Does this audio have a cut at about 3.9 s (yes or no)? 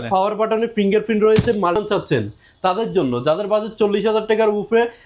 no